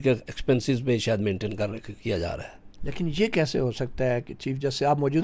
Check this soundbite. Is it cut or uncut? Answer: uncut